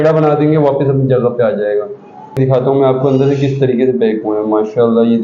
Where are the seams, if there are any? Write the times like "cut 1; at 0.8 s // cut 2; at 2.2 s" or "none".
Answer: cut 1; at 2.4 s